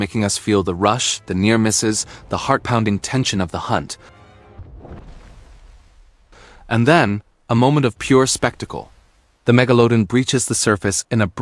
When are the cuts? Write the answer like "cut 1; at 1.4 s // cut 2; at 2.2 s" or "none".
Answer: none